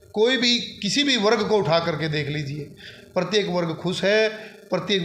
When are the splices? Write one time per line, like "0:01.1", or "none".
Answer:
none